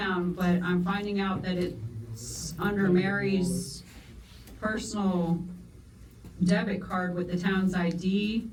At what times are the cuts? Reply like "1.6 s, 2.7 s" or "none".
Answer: none